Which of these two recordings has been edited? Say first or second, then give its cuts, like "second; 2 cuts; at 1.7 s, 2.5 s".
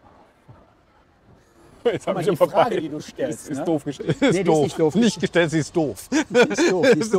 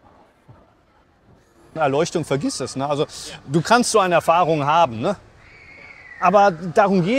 second; 1 cut; at 1.8 s